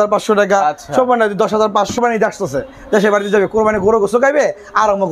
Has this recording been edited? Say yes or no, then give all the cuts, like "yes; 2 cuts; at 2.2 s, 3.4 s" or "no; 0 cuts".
yes; 1 cut; at 2.0 s